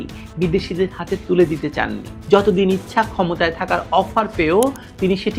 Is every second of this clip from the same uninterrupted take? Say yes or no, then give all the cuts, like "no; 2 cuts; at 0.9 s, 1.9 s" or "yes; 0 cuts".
yes; 0 cuts